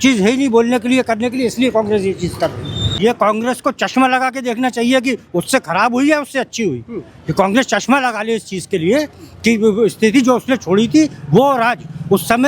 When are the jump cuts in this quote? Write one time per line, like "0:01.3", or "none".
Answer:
0:02.9